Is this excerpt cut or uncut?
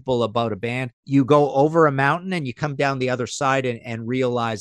cut